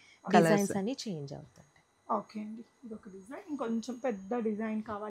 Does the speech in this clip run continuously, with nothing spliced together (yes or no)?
yes